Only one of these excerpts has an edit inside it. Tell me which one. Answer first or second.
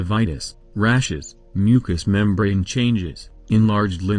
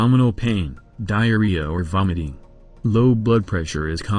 second